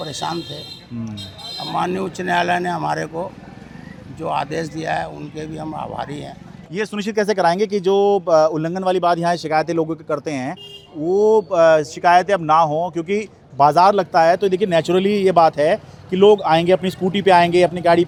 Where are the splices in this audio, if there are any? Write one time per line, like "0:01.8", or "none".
none